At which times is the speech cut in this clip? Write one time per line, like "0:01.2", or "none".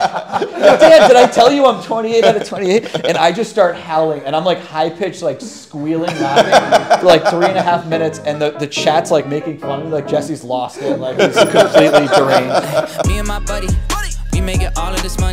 0:13.0